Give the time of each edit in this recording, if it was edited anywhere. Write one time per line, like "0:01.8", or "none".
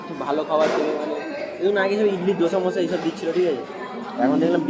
none